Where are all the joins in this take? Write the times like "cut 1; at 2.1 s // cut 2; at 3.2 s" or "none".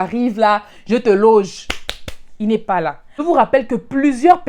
cut 1; at 3.1 s